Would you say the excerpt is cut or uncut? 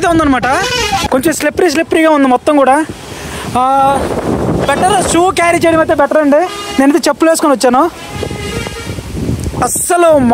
cut